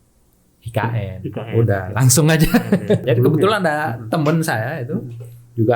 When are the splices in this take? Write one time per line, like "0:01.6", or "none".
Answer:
0:03.0